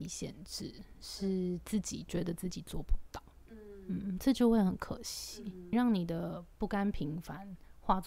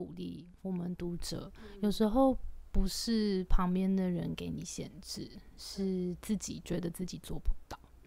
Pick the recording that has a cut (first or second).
first